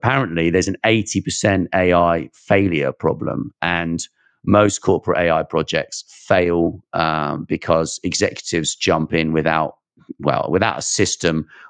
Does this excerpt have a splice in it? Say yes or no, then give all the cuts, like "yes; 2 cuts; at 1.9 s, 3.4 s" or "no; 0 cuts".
no; 0 cuts